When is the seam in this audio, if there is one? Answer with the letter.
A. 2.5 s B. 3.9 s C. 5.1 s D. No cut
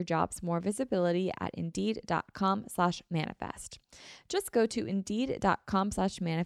D